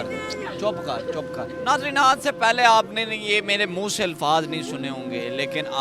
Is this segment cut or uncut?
cut